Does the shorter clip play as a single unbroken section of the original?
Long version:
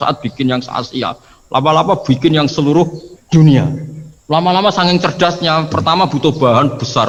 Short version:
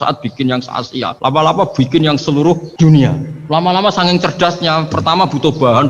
no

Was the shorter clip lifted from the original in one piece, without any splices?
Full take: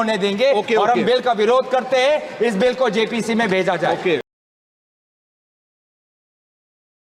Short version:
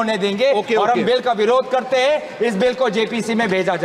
yes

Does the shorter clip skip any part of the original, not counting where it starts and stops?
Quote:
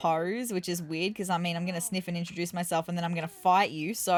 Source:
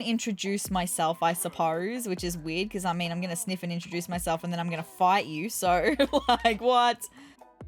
no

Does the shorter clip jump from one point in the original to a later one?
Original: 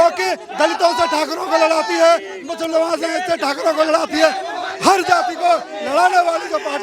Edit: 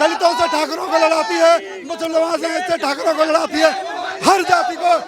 no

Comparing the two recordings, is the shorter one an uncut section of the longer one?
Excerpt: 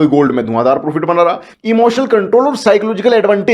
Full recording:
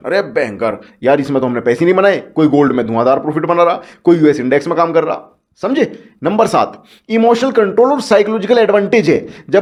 no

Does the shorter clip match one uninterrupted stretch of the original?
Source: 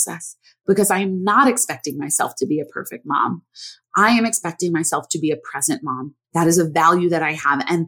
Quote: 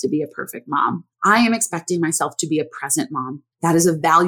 no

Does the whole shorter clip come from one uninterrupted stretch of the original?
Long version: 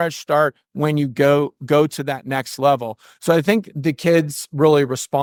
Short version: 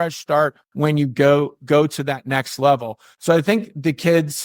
yes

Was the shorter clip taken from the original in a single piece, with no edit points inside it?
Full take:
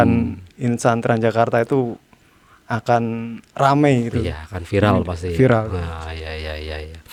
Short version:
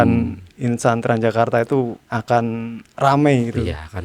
no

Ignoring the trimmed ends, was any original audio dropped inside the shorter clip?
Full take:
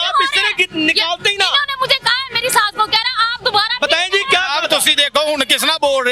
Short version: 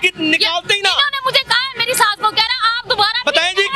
no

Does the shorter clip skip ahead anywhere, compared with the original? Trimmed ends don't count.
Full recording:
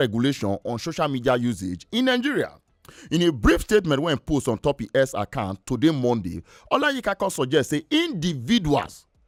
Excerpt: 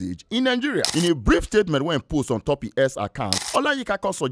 yes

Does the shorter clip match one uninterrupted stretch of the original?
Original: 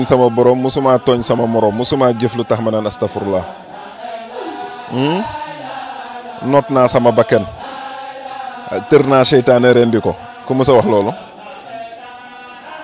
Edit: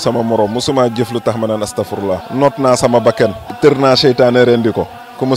no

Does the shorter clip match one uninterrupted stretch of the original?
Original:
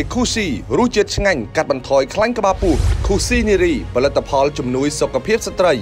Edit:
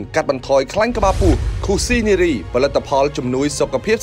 yes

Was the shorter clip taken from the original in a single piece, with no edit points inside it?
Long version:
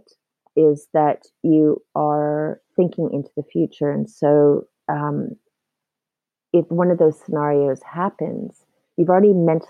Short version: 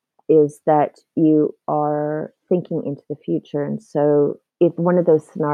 no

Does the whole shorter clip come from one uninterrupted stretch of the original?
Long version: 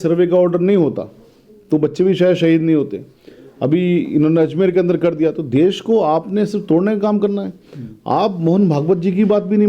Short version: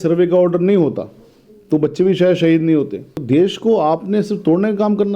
no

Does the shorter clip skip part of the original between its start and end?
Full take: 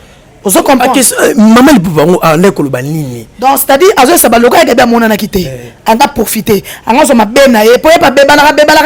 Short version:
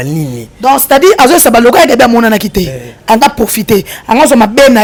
no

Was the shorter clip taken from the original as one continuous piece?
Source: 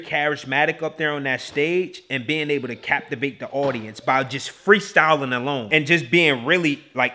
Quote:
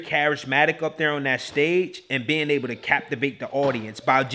yes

